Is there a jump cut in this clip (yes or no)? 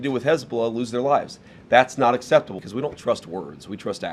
yes